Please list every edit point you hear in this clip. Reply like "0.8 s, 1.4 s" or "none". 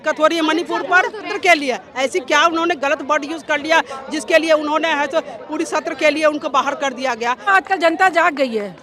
1.3 s, 7.5 s